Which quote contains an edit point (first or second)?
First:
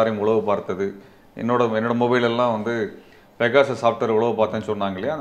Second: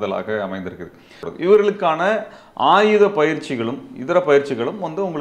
second